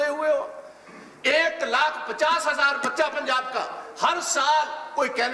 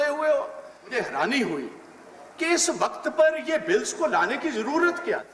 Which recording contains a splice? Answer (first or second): second